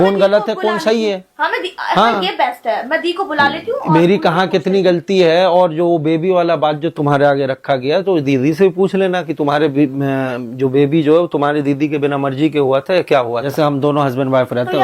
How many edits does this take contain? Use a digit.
1